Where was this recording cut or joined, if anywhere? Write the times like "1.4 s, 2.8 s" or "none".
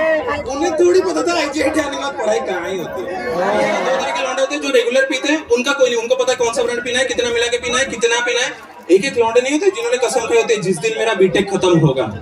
4.0 s

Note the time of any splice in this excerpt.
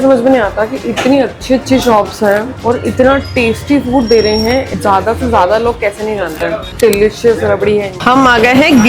2.5 s, 6.7 s, 8.0 s

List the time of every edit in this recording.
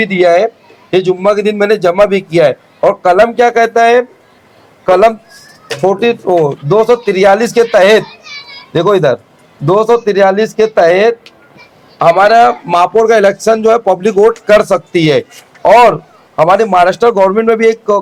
none

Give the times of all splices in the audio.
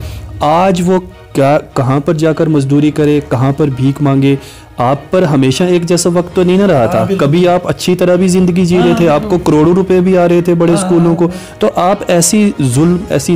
none

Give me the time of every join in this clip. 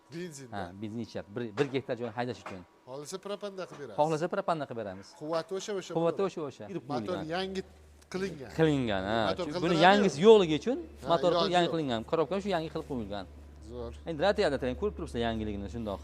6.7 s

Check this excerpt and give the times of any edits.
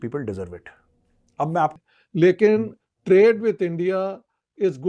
1.7 s

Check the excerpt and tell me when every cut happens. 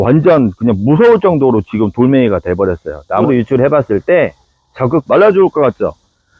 3.2 s, 5.0 s

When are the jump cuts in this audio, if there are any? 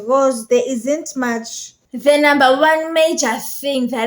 1.9 s

